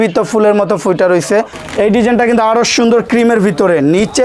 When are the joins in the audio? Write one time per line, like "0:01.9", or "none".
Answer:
0:01.6